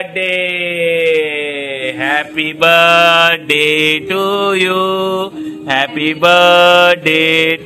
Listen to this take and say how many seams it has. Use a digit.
0